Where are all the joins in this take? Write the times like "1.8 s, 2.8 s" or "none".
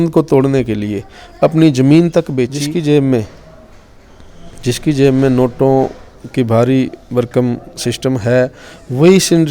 2.6 s

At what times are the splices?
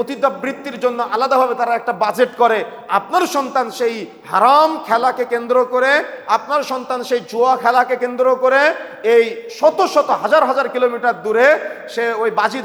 none

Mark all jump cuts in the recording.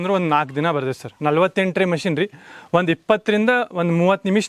1.1 s

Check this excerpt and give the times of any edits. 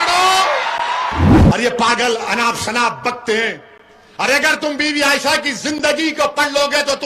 1.3 s

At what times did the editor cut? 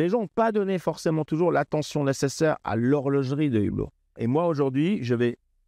4.2 s

